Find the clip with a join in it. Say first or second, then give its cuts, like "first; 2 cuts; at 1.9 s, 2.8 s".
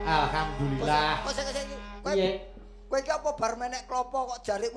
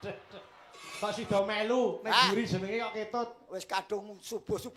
second; 1 cut; at 0.9 s